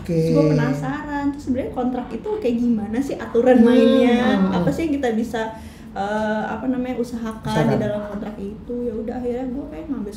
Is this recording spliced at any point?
no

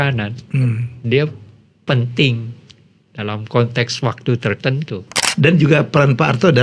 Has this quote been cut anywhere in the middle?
yes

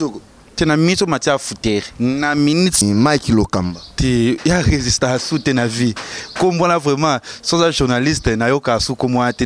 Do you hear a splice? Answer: yes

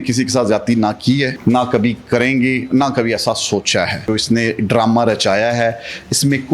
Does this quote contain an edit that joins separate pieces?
yes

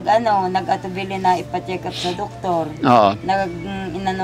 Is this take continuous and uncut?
no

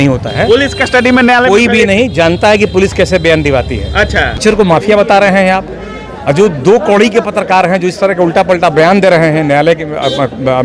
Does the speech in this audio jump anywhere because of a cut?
yes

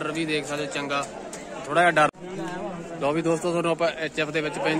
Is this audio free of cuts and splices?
no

